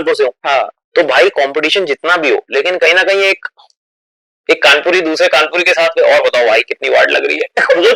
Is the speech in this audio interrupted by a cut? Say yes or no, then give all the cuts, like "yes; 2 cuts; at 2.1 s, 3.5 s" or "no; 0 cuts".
no; 0 cuts